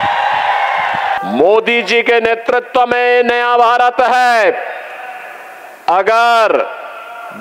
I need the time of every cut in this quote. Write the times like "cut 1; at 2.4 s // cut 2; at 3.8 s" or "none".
cut 1; at 1.2 s